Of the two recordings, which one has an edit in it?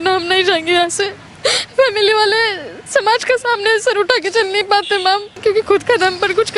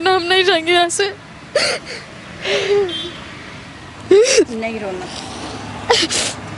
first; 2 cuts; at 1.2 s, 5.3 s

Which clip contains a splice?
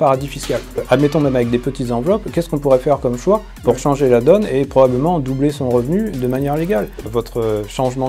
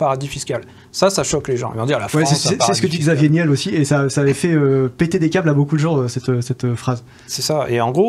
first; 2 cuts; at 0.8 s, 7.1 s

